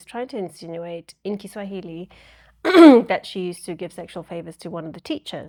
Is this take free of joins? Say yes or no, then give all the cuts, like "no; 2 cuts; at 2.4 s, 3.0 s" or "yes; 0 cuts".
yes; 0 cuts